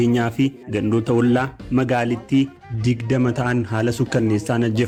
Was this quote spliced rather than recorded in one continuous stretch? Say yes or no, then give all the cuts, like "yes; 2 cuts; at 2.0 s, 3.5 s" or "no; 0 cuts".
no; 0 cuts